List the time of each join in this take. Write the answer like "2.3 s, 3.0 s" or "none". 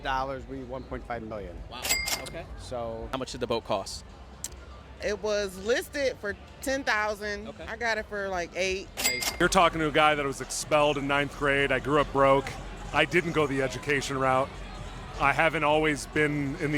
3.1 s, 9.2 s